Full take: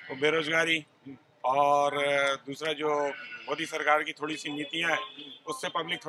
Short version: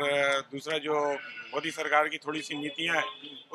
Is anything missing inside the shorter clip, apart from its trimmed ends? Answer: no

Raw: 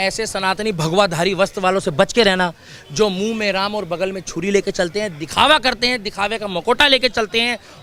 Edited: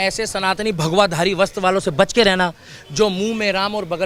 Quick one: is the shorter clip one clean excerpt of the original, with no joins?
yes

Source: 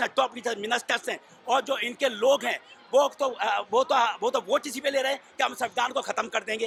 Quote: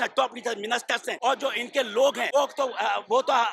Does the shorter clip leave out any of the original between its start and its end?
yes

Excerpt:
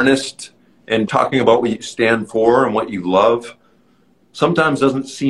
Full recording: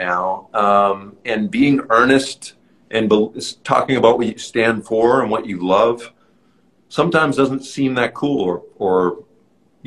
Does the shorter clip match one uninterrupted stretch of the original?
no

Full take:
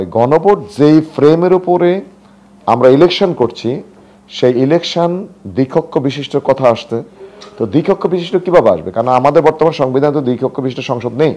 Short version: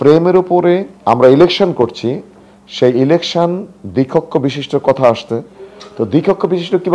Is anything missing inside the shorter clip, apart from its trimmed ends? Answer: yes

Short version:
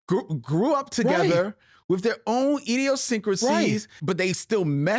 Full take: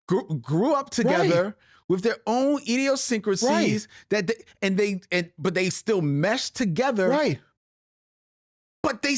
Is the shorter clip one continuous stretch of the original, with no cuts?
no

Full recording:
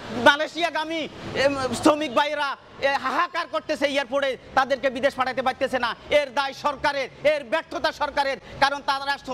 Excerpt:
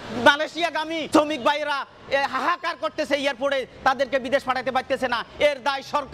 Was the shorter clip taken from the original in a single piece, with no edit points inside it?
no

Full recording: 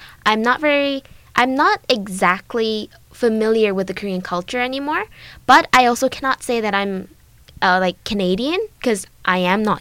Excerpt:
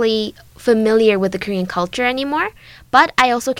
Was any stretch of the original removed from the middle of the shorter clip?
no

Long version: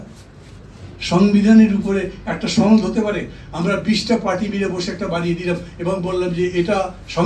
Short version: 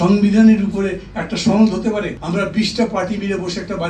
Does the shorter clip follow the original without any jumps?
no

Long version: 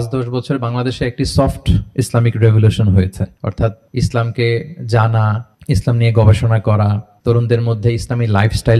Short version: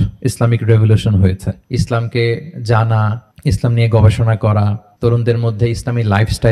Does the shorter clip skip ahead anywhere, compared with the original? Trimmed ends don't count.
yes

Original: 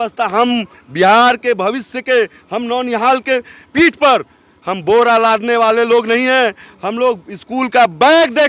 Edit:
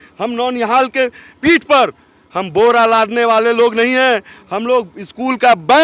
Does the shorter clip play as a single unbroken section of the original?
yes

